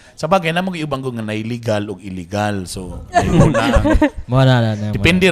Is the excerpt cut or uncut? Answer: uncut